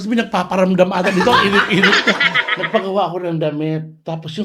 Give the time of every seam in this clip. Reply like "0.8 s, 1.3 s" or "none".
2.3 s